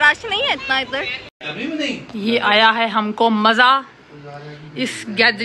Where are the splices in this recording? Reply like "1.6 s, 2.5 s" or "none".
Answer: 1.2 s